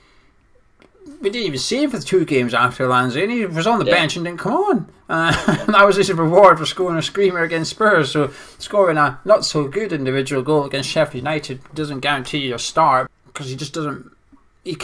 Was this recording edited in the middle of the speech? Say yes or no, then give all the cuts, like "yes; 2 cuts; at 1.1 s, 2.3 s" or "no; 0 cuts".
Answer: yes; 1 cut; at 13.0 s